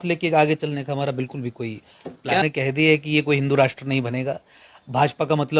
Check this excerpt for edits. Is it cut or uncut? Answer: cut